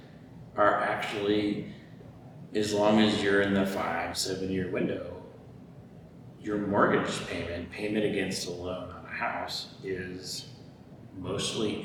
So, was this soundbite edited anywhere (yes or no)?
no